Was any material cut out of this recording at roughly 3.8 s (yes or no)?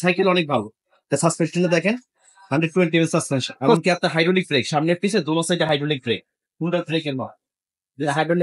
yes